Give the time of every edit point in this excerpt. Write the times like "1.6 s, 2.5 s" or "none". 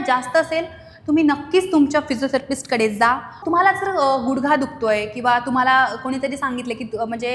3.4 s

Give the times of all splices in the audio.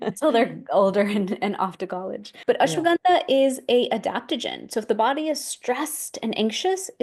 2.2 s

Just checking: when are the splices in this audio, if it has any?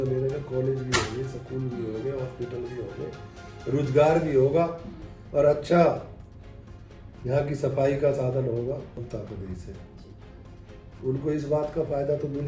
9.1 s

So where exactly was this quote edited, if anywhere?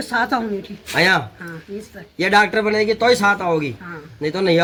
none

